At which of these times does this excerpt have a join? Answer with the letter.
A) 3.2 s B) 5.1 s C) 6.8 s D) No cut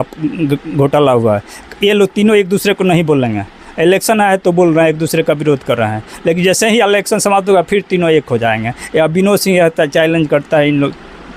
D